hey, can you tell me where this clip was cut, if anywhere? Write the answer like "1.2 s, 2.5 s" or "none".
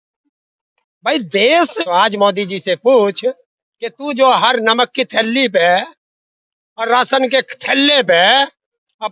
1.7 s